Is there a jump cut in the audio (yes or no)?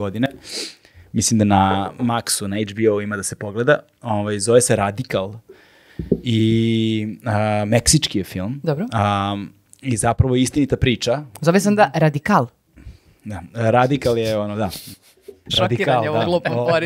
no